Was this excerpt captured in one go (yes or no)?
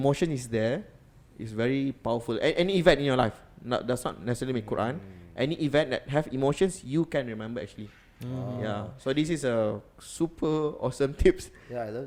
yes